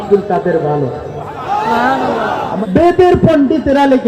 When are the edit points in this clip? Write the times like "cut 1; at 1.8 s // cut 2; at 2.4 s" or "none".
cut 1; at 2.6 s